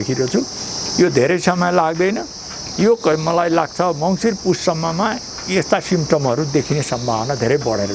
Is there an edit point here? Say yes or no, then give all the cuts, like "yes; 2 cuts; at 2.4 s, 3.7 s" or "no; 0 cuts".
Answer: no; 0 cuts